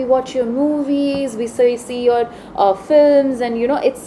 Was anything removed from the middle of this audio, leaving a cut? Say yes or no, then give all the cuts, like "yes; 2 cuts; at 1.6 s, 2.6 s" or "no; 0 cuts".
no; 0 cuts